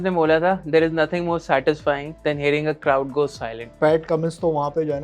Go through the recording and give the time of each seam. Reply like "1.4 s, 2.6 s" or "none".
2.1 s, 3.7 s